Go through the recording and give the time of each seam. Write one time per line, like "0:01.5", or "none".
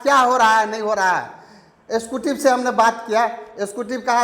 none